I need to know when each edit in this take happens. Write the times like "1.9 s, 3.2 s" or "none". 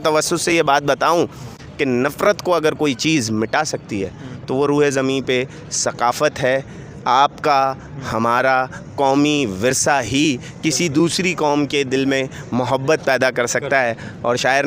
none